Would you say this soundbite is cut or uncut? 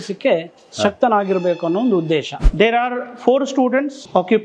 cut